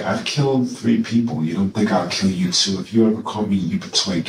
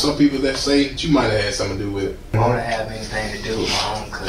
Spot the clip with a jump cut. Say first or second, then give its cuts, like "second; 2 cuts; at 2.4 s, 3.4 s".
second; 2 cuts; at 1.0 s, 2.3 s